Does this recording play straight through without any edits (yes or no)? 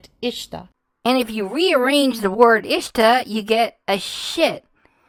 yes